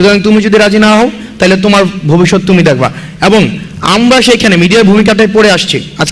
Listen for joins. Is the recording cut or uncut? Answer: uncut